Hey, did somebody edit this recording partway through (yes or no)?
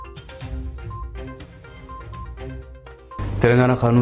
yes